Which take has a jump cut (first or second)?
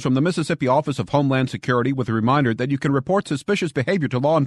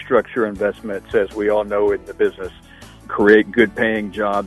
second